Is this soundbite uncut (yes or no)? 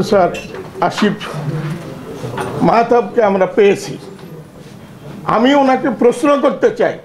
yes